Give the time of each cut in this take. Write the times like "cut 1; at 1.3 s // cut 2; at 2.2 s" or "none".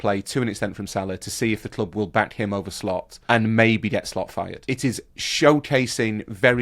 cut 1; at 3.1 s // cut 2; at 4.7 s